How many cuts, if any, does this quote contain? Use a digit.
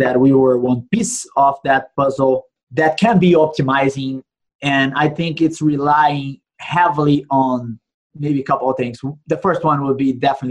1